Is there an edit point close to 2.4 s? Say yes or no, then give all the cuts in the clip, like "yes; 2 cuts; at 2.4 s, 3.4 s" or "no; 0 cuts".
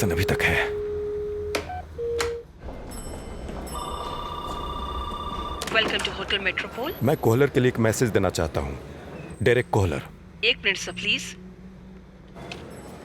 yes; 1 cut; at 2.4 s